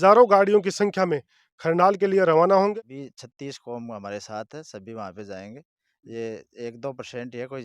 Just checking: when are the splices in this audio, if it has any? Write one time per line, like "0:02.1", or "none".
0:02.7